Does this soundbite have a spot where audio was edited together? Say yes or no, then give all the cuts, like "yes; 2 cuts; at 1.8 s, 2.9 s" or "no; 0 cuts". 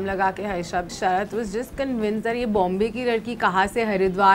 yes; 1 cut; at 0.9 s